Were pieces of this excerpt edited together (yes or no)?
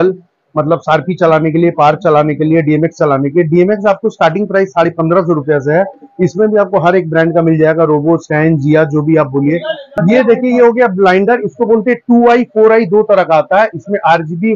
yes